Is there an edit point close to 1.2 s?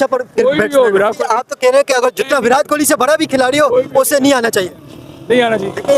yes; 1 cut; at 1.2 s

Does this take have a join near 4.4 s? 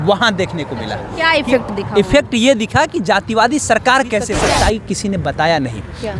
yes; 1 cut; at 4.4 s

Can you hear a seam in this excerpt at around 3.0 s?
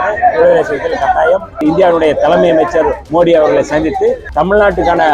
yes; 3 cuts; at 1.6 s, 3.0 s, 4.2 s

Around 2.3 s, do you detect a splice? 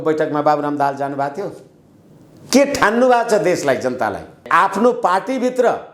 no; 1 cut; at 4.4 s

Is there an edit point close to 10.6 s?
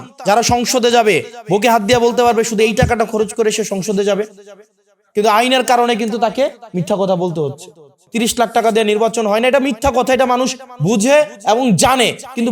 no; 1 cut; at 8.0 s

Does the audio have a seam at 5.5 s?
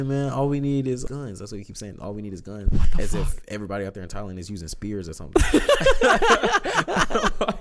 no; 1 cut; at 1.1 s

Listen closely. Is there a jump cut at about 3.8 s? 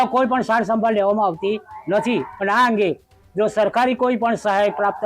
no; 1 cut; at 2.3 s

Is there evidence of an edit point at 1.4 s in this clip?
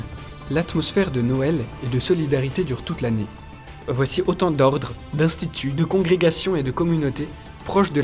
no; 1 cut; at 3.8 s

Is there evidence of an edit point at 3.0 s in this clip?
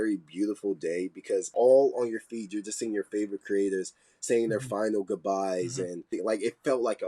no; 2 cuts; at 1.5 s, 6.1 s

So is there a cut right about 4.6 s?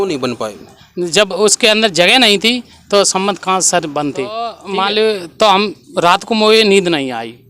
yes; 1 cut; at 4.6 s

